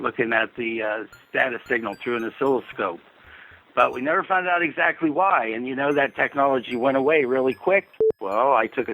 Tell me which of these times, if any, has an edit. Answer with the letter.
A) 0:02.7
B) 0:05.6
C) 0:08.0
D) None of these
C